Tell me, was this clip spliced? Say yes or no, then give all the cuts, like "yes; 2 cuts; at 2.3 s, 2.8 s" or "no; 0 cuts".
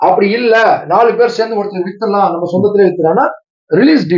no; 0 cuts